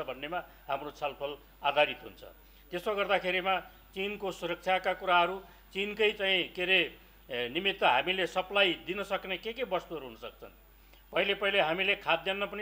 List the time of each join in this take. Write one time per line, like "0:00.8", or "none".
none